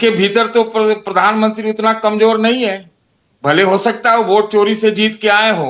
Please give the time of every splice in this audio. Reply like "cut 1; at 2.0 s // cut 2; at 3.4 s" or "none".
none

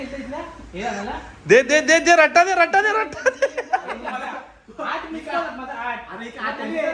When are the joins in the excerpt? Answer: none

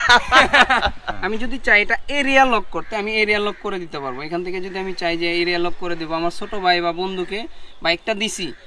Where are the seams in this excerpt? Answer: cut 1; at 1.1 s

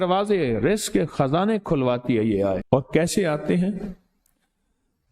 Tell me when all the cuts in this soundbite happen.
cut 1; at 2.6 s

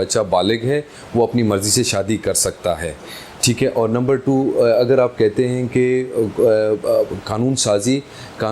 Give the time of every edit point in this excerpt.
none

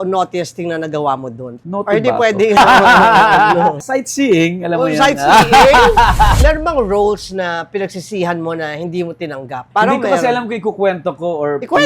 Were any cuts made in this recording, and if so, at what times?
cut 1; at 1.5 s // cut 2; at 2.6 s // cut 3; at 6.4 s // cut 4; at 9.6 s

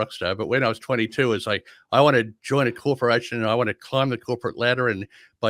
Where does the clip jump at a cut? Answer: none

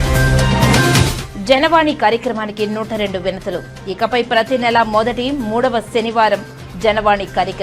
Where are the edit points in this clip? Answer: cut 1; at 1.2 s

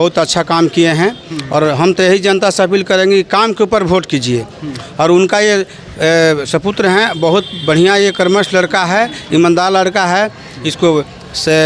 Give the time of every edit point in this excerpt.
none

